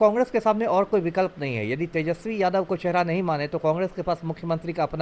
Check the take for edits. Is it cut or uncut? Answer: uncut